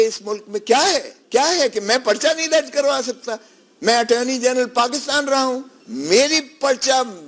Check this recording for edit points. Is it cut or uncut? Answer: cut